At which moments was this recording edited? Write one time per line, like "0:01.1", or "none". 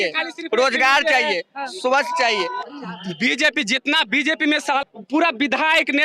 0:02.6
0:04.8